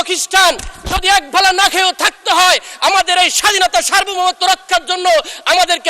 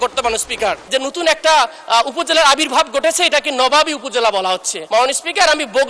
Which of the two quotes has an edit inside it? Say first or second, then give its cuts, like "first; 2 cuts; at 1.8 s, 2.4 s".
second; 2 cuts; at 0.8 s, 4.7 s